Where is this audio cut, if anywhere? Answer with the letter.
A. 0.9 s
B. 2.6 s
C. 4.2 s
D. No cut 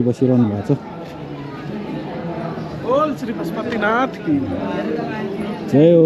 D